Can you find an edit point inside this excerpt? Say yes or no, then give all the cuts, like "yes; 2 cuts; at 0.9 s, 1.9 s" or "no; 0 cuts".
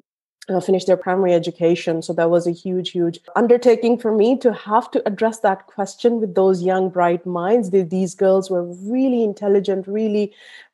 yes; 2 cuts; at 1.0 s, 3.3 s